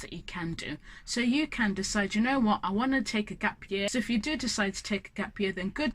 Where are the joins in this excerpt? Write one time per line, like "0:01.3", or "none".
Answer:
0:03.9